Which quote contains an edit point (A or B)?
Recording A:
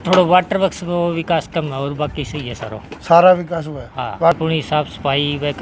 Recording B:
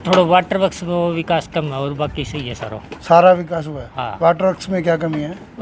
A